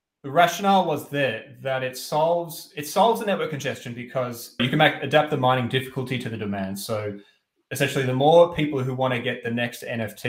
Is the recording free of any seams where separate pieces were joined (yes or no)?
no